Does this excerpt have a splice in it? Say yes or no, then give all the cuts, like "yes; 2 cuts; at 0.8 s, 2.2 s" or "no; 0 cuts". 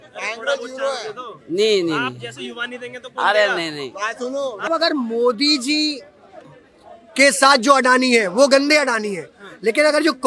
yes; 1 cut; at 4.7 s